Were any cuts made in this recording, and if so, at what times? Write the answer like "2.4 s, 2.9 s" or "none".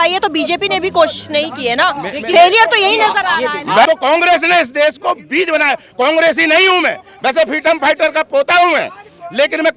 3.9 s